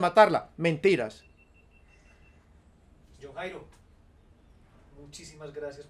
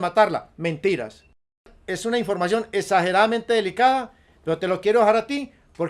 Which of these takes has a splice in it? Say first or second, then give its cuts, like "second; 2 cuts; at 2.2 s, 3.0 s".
second; 1 cut; at 1.8 s